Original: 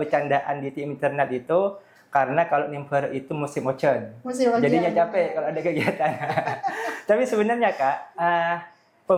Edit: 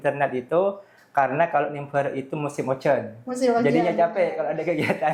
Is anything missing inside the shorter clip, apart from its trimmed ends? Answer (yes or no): no